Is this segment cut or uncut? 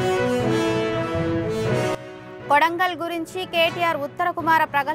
cut